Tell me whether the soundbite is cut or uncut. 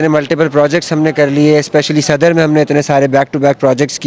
uncut